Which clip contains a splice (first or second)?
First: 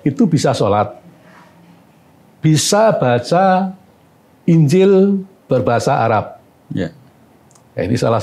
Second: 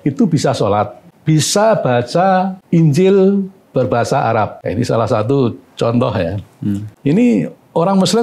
second